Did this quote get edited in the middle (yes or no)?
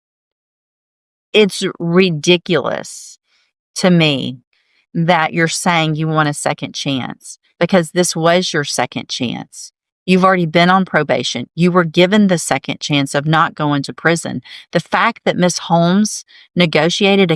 no